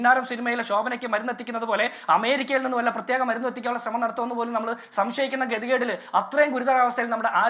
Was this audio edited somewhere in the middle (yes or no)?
no